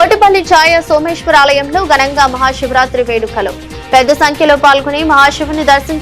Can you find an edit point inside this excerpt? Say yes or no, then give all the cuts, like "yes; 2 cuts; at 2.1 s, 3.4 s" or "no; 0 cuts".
no; 0 cuts